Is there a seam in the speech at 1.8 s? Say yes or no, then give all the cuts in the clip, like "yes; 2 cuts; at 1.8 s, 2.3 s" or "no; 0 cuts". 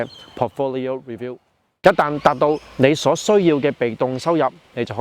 yes; 1 cut; at 1.8 s